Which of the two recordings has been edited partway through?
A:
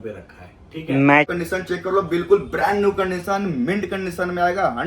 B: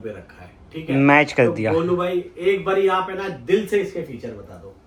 A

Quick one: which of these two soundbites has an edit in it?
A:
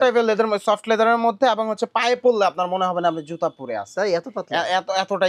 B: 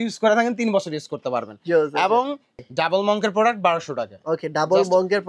B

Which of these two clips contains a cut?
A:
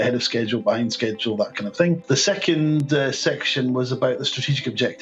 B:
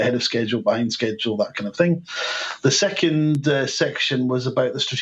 A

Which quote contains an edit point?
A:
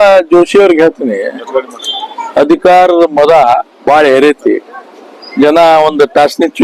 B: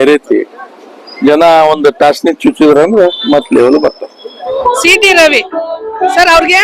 B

